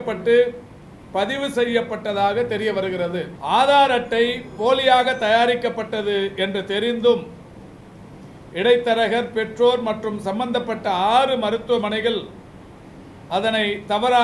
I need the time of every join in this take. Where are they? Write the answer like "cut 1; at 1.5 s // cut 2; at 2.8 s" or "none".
cut 1; at 3.3 s